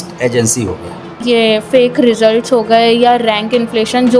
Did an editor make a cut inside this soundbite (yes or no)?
yes